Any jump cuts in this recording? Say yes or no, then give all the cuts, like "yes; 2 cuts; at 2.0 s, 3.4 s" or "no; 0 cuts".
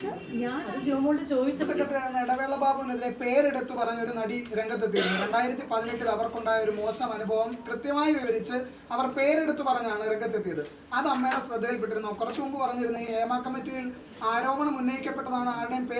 yes; 1 cut; at 1.6 s